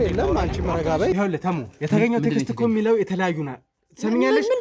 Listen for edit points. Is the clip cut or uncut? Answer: cut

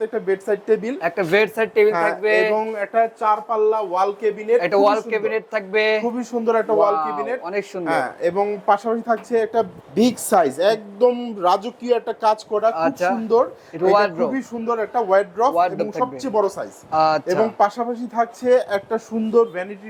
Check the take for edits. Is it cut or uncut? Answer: uncut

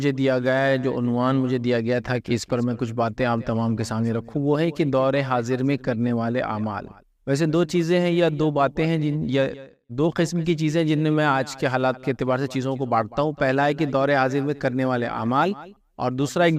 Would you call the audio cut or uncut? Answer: uncut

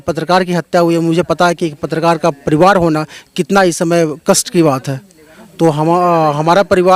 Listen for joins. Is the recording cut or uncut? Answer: uncut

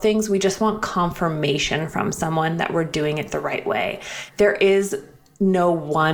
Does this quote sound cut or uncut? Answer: cut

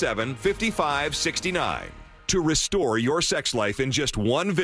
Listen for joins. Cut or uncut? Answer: cut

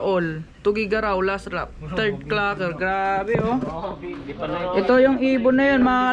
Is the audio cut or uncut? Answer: uncut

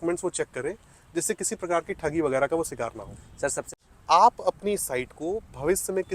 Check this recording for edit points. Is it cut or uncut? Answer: cut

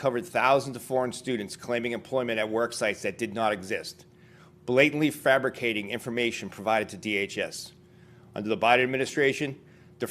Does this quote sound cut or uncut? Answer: cut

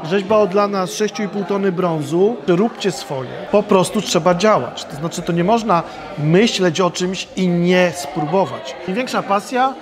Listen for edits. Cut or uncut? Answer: cut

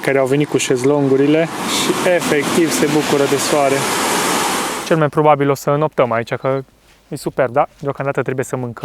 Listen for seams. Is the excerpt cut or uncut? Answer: cut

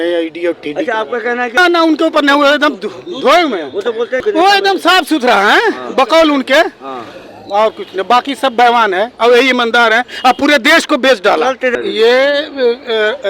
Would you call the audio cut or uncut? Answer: cut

